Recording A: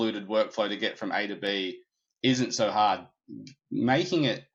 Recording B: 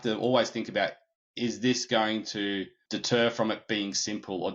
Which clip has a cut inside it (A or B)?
B